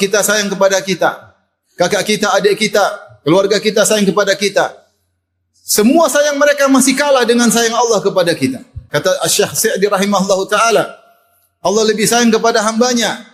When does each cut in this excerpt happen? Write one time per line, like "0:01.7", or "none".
0:08.7

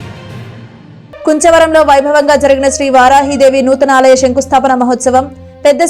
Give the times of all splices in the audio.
0:01.0

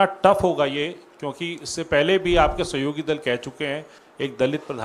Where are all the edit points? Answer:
none

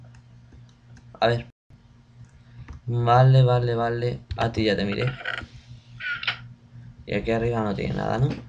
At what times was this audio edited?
0:07.5

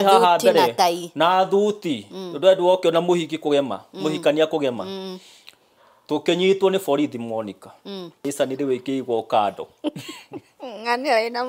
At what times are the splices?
0:08.2

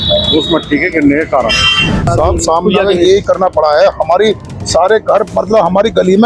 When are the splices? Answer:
0:02.1

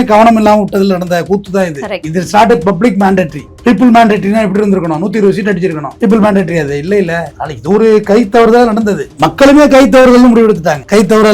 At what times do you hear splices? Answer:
0:09.1

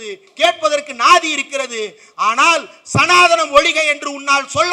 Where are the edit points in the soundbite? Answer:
none

